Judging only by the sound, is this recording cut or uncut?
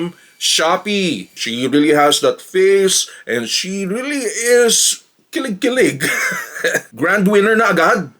cut